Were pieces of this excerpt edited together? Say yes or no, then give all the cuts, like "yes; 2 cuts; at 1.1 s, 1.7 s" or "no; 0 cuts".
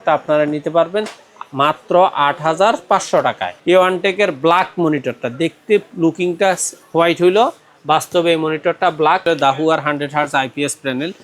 yes; 2 cuts; at 3.5 s, 9.2 s